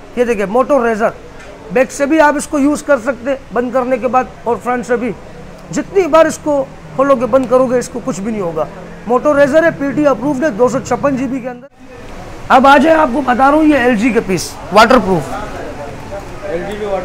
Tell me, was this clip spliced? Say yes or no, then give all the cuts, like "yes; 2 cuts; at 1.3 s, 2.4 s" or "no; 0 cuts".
yes; 1 cut; at 11.5 s